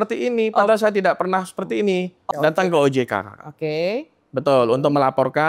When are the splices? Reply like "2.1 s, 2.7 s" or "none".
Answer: 2.2 s